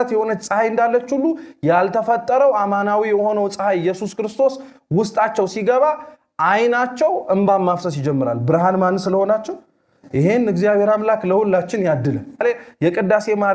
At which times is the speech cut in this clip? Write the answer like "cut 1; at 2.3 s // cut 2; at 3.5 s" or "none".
cut 1; at 12.4 s